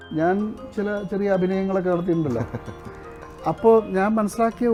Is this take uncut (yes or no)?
yes